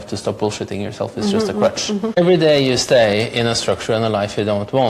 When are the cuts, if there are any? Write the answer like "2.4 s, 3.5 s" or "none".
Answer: 2.2 s